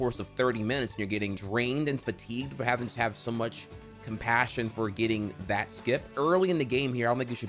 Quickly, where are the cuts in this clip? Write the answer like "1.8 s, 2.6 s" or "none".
1.4 s, 6.1 s